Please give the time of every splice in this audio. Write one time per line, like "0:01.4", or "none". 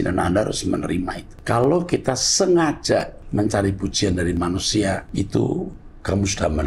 0:01.3
0:03.2
0:05.1